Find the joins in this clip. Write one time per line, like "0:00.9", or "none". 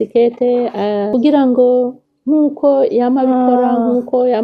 0:01.1